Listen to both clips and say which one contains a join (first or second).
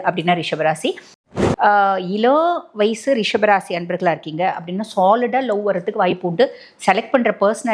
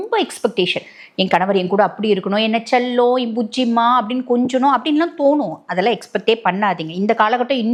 first